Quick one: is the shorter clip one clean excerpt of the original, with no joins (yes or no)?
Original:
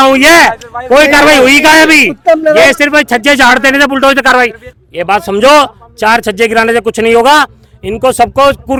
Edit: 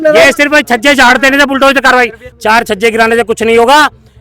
no